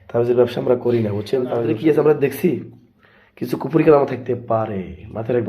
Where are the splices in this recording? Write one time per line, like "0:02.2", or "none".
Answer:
0:01.5